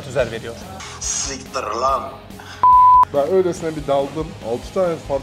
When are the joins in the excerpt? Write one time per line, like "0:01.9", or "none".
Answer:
0:03.1

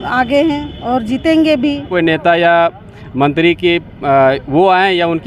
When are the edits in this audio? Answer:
0:01.9

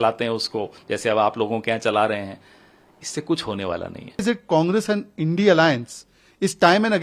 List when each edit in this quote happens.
0:04.2

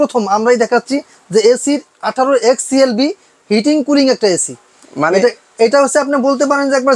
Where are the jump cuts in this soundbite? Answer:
none

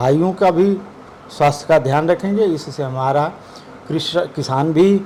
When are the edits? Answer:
none

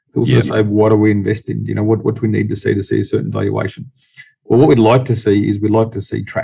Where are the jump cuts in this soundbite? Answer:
none

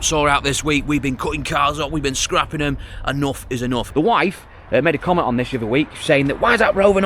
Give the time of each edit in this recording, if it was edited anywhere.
0:03.9

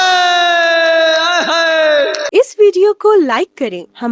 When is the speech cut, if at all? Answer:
0:02.2

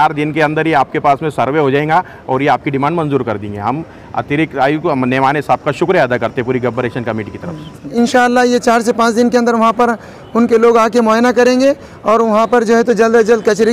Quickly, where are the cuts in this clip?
0:07.9

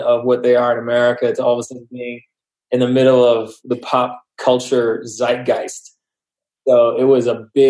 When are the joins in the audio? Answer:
none

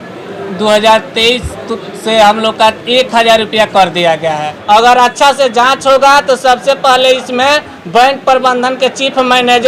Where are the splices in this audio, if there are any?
0:04.6

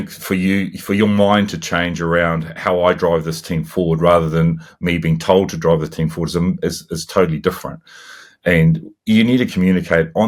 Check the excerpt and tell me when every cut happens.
none

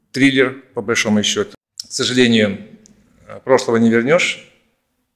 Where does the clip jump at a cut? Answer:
0:01.5

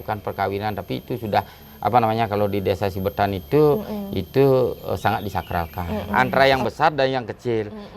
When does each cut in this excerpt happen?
0:06.1

